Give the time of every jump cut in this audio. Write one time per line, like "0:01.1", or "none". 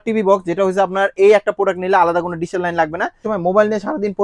0:03.2